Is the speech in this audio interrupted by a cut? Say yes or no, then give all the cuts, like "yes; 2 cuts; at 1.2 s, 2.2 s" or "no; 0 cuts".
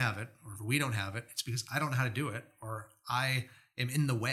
no; 0 cuts